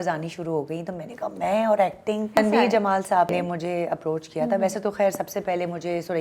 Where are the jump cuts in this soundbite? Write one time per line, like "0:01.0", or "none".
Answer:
0:02.4
0:03.3